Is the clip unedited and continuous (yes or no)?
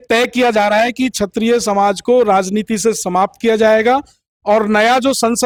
yes